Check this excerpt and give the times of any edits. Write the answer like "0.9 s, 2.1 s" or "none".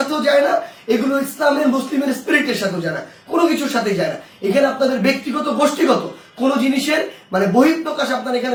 none